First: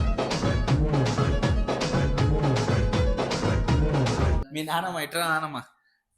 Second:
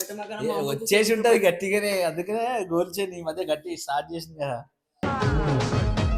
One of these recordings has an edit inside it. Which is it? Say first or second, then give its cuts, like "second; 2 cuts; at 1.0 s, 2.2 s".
first; 1 cut; at 4.5 s